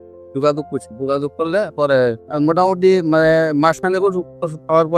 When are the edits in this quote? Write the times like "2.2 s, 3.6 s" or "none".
2.2 s